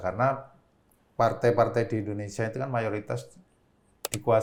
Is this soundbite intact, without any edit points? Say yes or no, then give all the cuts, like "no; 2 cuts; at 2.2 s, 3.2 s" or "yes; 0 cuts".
yes; 0 cuts